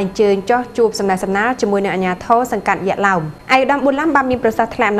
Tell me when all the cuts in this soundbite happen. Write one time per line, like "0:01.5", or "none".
0:03.3